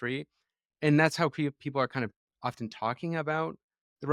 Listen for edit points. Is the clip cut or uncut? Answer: uncut